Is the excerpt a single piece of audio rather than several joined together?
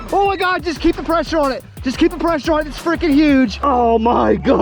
no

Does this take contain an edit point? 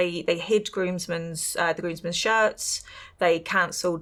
no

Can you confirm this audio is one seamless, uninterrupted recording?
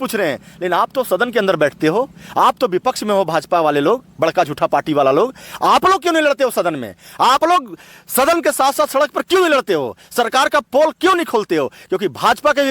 yes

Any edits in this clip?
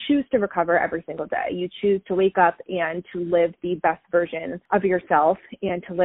yes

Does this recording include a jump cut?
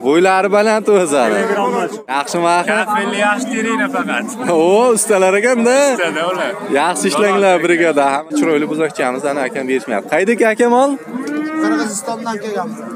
yes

